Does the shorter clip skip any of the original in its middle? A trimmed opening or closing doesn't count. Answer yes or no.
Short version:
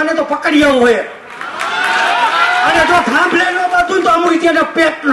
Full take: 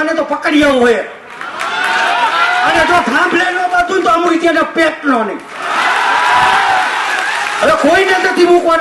no